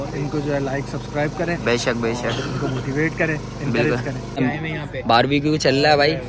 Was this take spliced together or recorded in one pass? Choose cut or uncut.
cut